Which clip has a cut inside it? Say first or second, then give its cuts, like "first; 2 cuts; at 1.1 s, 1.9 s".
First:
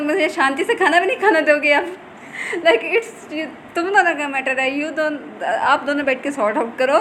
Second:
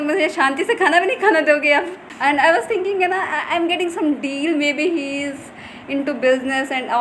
second; 1 cut; at 2.0 s